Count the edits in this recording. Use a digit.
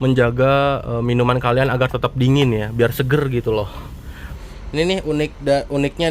1